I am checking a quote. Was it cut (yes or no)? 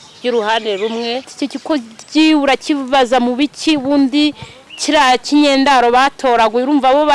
yes